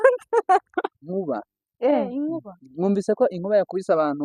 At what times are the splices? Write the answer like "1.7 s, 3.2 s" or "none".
1.0 s